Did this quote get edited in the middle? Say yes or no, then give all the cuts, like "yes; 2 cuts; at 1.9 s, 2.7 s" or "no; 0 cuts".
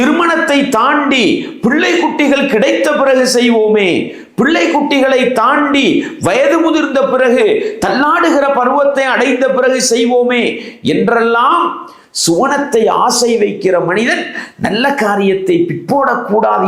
no; 0 cuts